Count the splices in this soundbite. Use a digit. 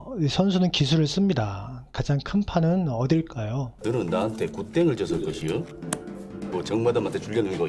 1